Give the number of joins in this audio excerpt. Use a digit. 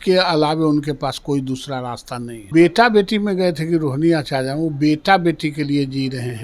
1